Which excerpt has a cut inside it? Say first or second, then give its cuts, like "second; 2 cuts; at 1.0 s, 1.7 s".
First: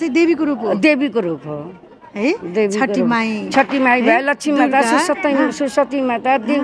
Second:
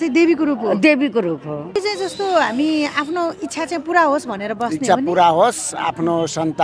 second; 1 cut; at 1.8 s